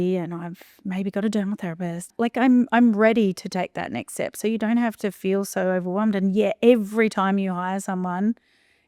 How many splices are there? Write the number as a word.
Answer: one